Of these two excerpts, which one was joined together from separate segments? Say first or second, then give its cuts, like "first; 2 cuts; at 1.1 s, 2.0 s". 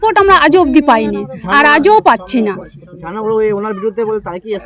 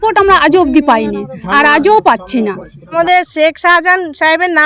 second; 1 cut; at 2.9 s